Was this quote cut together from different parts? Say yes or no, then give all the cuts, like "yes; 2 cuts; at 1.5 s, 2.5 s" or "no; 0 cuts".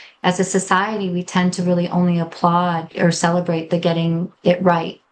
yes; 1 cut; at 2.9 s